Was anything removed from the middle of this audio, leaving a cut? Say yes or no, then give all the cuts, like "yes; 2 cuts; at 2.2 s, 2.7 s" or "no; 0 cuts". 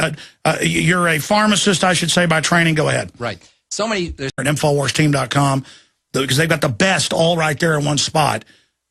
no; 0 cuts